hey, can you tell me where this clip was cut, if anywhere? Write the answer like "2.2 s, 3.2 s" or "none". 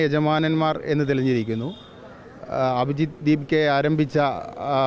none